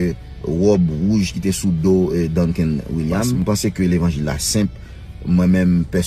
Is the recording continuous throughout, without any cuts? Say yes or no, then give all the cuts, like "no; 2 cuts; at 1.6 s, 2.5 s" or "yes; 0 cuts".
no; 1 cut; at 3.3 s